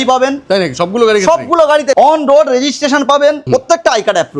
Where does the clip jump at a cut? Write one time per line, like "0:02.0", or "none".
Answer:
0:01.9
0:03.4